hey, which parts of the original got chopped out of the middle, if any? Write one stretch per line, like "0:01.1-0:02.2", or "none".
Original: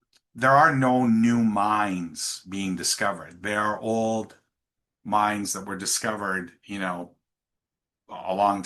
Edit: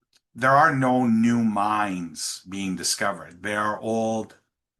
none